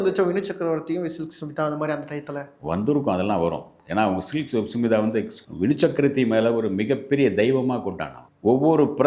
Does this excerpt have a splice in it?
no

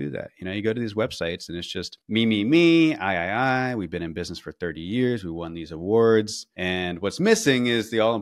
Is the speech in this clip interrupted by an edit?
no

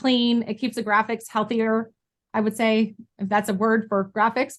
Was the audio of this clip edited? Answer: no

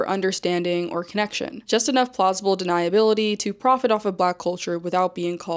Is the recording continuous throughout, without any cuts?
yes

